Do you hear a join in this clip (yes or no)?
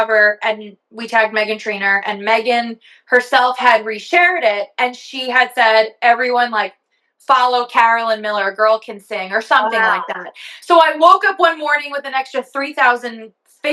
no